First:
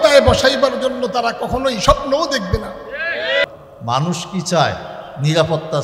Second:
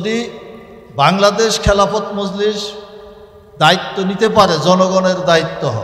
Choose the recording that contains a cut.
first; 1 cut; at 3.5 s

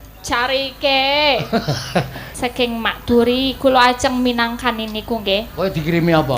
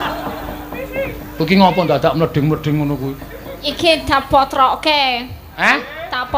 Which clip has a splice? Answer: first; 1 cut; at 2.2 s

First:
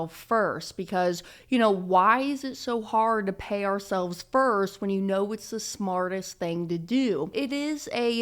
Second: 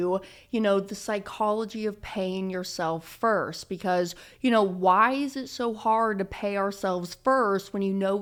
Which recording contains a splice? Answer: first; 1 cut; at 7.3 s

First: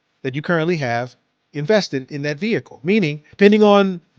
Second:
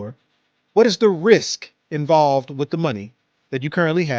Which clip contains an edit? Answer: first; 1 cut; at 3.2 s

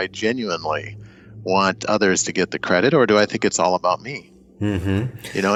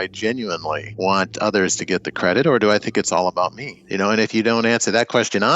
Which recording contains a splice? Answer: second; 2 cuts; at 0.9 s, 3.8 s

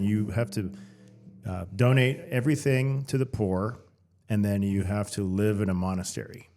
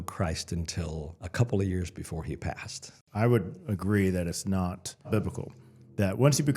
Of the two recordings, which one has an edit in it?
second; 3 cuts; at 1.2 s, 3.0 s, 5.1 s

